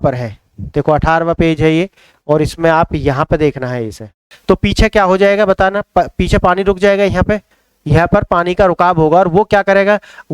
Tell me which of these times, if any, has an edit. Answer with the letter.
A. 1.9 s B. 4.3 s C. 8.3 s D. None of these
B